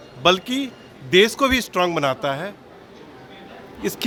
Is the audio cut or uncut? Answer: uncut